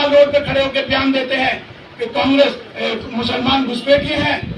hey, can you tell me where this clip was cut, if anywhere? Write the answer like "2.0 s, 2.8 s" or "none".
none